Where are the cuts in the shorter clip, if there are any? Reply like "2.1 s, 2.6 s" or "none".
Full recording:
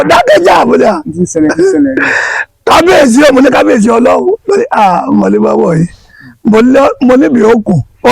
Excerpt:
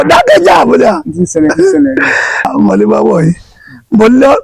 2.5 s